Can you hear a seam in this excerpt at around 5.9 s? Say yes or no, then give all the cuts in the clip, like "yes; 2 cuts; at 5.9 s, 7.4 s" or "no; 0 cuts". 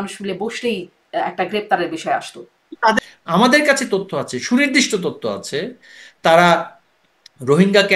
no; 1 cut; at 3.0 s